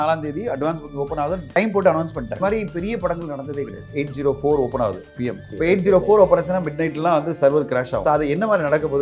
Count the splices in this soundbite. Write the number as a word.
five